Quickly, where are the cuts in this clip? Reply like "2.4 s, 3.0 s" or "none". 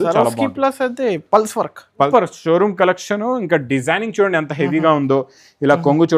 2.1 s